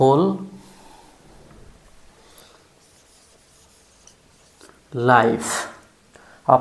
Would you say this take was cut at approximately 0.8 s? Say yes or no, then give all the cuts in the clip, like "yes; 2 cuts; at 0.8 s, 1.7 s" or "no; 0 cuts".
no; 0 cuts